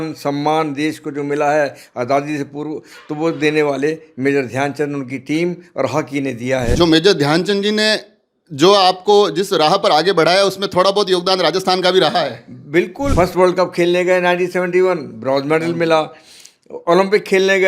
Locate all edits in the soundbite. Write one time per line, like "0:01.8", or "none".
0:06.7
0:13.1